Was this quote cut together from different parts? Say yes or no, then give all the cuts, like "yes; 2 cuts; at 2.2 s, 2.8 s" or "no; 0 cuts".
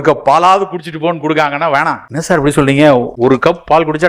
yes; 2 cuts; at 2.1 s, 3.1 s